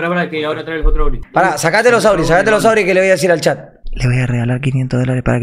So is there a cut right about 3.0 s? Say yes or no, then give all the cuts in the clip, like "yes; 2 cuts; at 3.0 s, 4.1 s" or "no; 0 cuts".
no; 1 cut; at 1.2 s